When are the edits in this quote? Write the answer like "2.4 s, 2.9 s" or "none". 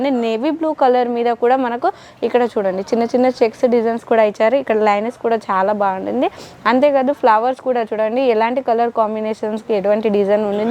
none

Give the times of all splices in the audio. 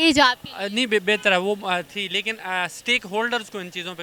none

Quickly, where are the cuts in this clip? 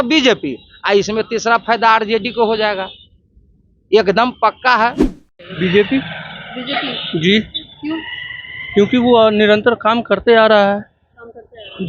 5.1 s

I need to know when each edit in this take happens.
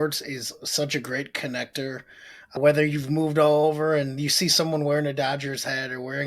2.6 s

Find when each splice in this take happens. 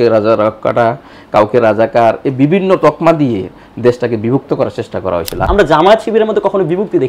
5.4 s

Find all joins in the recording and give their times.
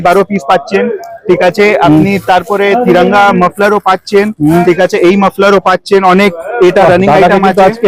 none

